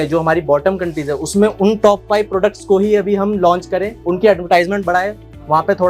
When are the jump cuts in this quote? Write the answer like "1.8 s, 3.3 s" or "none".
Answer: none